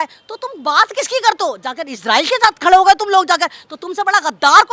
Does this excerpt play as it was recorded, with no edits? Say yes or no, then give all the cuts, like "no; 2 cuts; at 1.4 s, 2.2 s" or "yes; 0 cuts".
yes; 0 cuts